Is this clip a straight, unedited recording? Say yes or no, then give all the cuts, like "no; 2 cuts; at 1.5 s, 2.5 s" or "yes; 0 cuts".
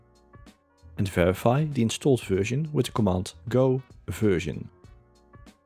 no; 3 cuts; at 0.9 s, 3.3 s, 4.7 s